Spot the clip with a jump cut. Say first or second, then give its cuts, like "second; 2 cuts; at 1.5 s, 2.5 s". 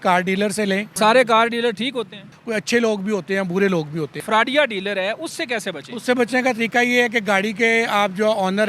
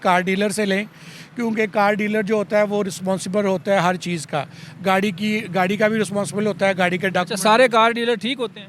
first; 3 cuts; at 0.9 s, 2.4 s, 4.2 s